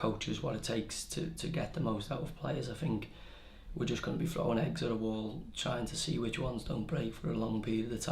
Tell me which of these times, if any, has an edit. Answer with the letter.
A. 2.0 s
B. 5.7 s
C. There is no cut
A